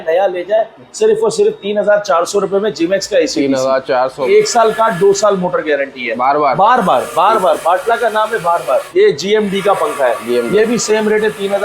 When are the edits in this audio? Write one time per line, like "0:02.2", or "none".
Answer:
0:04.3
0:06.1
0:08.9